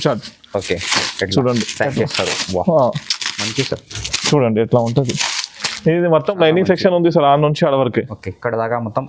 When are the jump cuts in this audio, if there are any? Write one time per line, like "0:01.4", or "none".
none